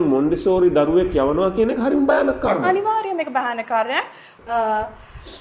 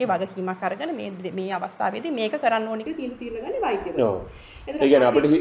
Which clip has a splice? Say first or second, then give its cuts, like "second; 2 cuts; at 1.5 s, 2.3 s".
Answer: first; 1 cut; at 4.3 s